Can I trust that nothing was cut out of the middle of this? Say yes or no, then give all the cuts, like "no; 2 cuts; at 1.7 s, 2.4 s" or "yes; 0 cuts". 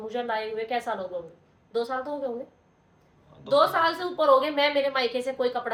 yes; 0 cuts